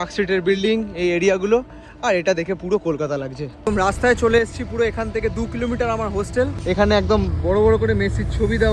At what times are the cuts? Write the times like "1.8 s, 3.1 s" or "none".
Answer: 3.7 s, 6.6 s